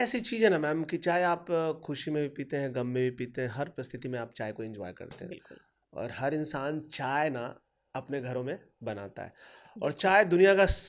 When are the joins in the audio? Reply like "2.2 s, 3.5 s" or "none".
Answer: none